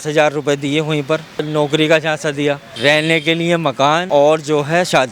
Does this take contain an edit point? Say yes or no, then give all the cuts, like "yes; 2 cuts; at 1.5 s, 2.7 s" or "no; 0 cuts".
yes; 3 cuts; at 1.5 s, 2.7 s, 4.0 s